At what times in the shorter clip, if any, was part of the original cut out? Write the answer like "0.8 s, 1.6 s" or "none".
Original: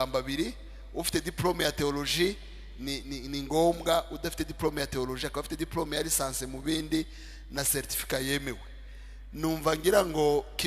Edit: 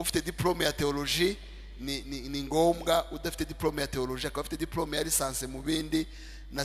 none

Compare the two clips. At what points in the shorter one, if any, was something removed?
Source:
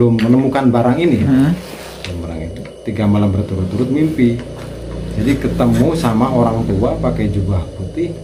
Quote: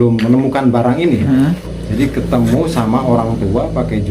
1.7 s

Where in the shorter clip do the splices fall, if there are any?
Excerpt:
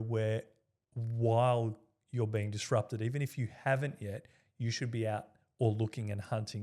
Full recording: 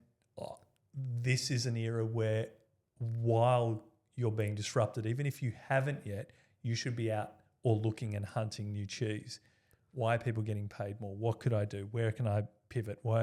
none

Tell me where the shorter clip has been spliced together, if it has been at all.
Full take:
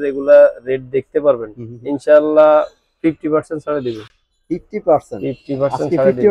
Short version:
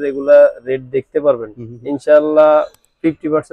none

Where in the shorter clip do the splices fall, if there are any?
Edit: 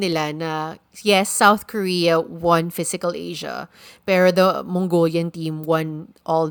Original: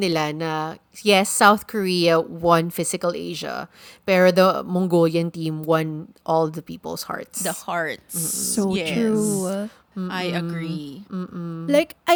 none

